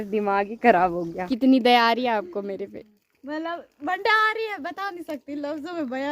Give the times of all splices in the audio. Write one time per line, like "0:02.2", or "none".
0:01.2